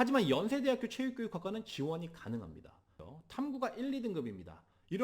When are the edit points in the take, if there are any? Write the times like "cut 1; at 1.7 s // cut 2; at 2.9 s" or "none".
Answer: cut 1; at 2.9 s

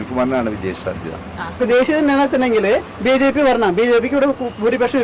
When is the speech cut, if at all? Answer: cut 1; at 1.5 s

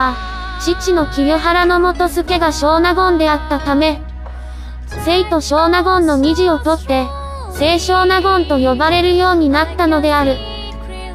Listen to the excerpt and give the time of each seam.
none

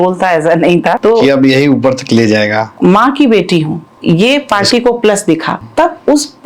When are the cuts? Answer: cut 1; at 1.0 s // cut 2; at 2.7 s // cut 3; at 3.8 s // cut 4; at 5.6 s

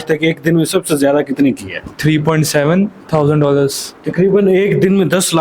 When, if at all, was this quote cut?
cut 1; at 1.9 s // cut 2; at 4.0 s

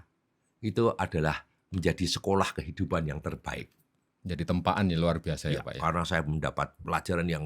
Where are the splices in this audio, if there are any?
none

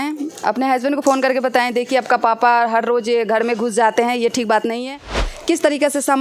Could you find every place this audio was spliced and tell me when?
cut 1; at 5.2 s

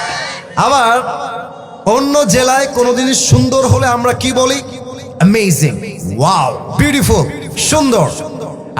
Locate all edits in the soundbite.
none

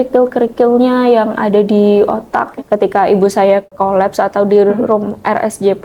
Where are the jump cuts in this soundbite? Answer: cut 1; at 2.4 s // cut 2; at 3.8 s

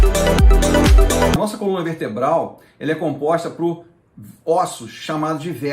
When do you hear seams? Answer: cut 1; at 1.4 s

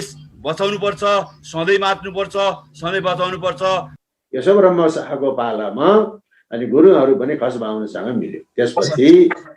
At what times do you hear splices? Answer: cut 1; at 3.9 s

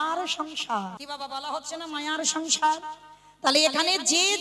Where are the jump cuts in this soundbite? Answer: cut 1; at 1.0 s

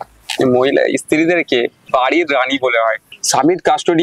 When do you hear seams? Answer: cut 1; at 1.8 s // cut 2; at 3.1 s

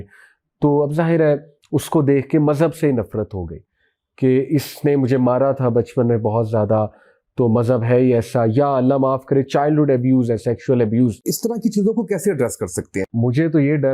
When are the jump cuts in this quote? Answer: cut 1; at 11.3 s // cut 2; at 13.0 s

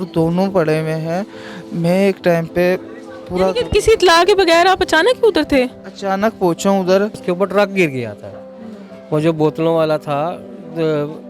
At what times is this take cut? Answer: cut 1; at 7.2 s

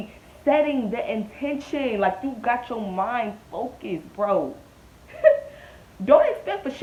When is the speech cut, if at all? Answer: none

